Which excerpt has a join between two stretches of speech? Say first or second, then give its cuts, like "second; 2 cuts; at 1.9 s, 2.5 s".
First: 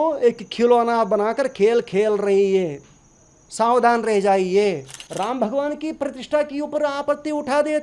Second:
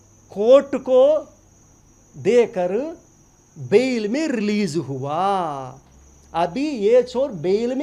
first; 1 cut; at 5.0 s